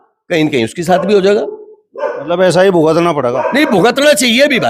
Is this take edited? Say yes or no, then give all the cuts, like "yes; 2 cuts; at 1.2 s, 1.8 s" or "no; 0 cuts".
no; 0 cuts